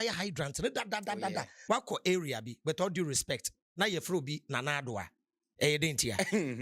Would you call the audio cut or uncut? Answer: cut